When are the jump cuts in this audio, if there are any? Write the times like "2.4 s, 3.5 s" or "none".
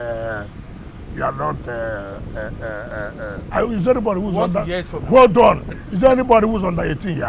none